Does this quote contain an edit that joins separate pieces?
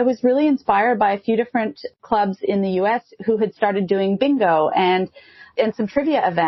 no; 0 cuts

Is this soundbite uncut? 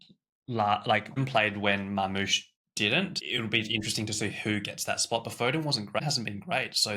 no; 3 cuts; at 1.2 s, 3.1 s, 6.0 s

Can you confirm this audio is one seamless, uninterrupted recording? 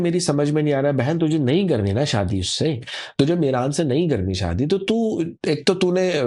yes; 0 cuts

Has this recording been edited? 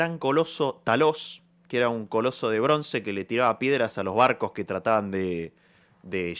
no; 0 cuts

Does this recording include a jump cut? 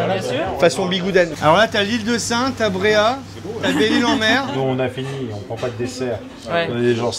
yes; 2 cuts; at 1.3 s, 4.4 s

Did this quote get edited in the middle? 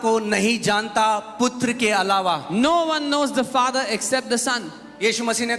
no; 0 cuts

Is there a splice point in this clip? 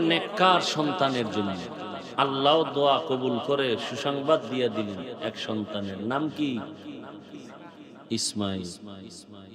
no; 0 cuts

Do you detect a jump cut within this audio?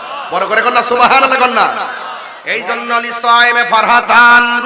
yes; 1 cut; at 2.4 s

